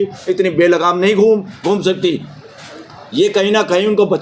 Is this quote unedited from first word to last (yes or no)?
yes